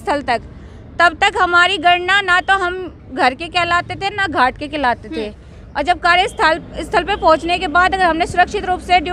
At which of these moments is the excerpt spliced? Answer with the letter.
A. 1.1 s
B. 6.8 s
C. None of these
C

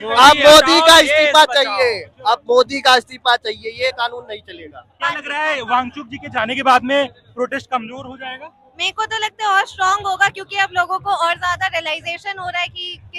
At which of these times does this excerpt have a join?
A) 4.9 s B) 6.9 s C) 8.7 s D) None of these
A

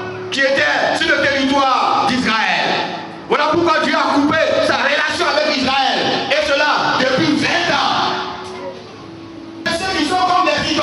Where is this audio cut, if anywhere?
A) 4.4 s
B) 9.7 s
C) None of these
B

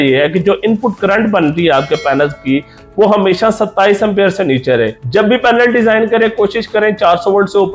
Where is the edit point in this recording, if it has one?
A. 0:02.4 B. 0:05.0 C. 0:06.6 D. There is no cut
B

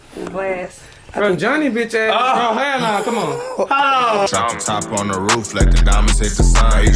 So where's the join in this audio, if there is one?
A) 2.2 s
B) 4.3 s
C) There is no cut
B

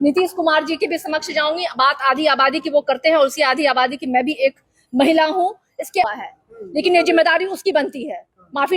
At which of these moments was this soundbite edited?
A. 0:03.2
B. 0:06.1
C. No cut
B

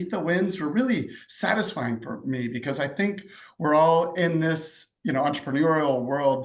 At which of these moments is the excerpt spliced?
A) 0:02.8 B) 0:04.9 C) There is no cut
C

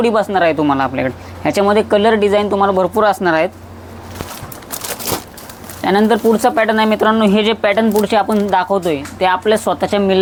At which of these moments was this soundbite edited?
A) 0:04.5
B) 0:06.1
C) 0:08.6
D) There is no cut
D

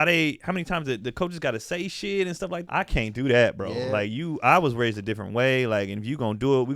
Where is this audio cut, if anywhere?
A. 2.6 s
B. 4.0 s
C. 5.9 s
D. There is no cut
A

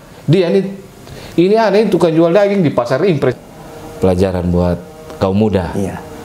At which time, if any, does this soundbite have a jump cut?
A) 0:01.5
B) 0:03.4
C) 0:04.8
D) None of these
B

